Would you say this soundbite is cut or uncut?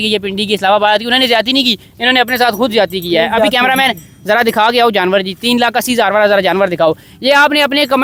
uncut